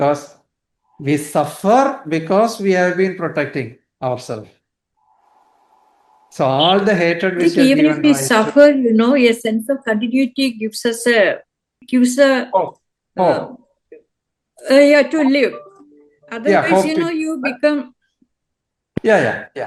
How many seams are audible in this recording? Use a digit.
0